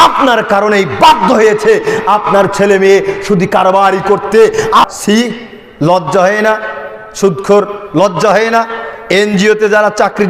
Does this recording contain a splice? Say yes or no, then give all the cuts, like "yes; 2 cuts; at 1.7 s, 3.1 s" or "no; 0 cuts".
yes; 1 cut; at 4.9 s